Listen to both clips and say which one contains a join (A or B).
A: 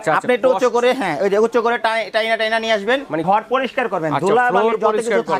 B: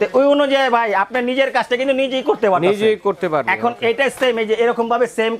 A